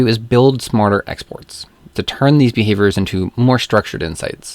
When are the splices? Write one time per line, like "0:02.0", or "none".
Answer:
0:02.0